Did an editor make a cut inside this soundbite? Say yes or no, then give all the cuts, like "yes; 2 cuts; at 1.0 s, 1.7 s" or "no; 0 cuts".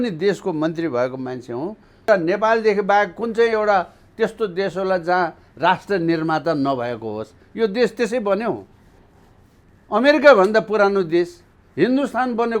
yes; 1 cut; at 2.1 s